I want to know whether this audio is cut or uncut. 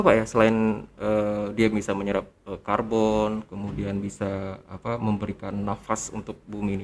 uncut